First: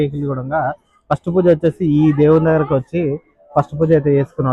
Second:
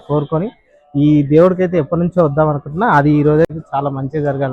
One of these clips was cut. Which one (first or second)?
second